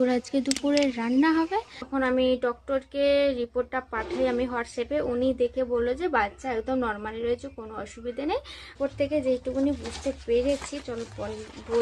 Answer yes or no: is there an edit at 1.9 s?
yes